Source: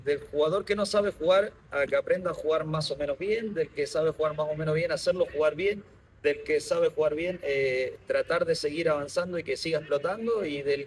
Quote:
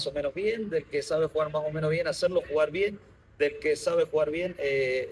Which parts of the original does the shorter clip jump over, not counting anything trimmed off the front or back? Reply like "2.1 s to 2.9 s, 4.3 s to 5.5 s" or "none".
none